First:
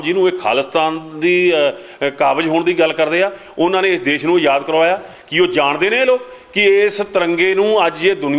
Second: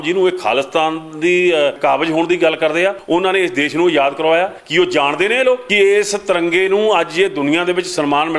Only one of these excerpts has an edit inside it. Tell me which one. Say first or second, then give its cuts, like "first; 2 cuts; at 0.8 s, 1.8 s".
second; 4 cuts; at 1.8 s, 3.0 s, 4.6 s, 5.7 s